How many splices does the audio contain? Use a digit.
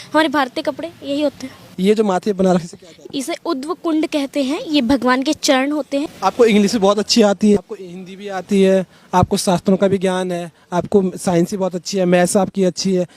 3